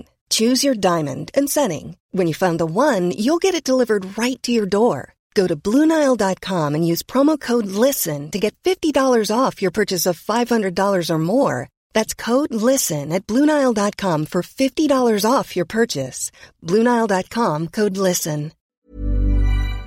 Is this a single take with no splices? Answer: no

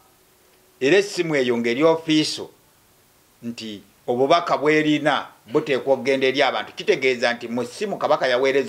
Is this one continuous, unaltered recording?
yes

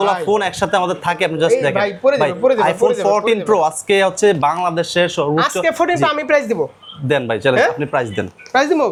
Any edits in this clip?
no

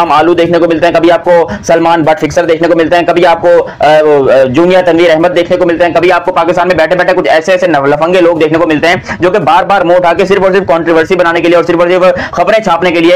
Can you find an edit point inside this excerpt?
no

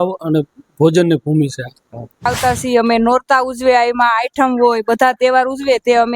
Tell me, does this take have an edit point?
yes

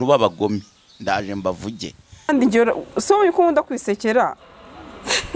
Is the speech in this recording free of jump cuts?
no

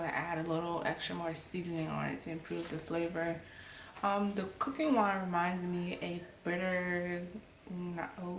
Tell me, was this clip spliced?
no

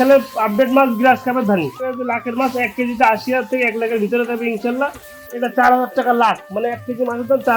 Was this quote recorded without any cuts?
no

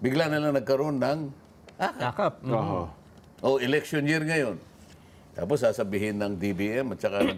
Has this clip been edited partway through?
no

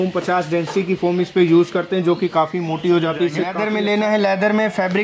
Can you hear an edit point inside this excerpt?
yes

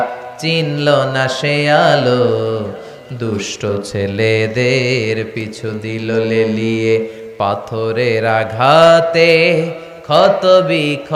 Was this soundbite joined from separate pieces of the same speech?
no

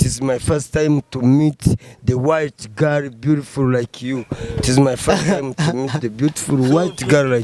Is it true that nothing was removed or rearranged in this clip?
yes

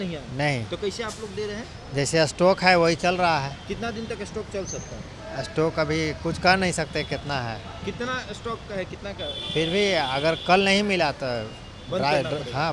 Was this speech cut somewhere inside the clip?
no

